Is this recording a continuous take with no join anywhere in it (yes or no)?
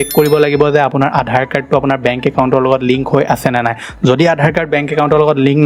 yes